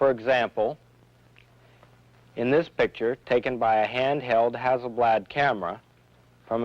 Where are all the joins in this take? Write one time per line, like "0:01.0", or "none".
0:05.3